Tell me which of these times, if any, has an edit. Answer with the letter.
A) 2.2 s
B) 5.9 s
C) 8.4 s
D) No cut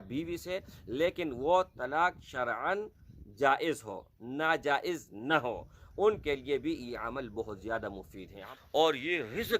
C